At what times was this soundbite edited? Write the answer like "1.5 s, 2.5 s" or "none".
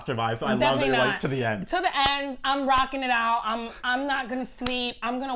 none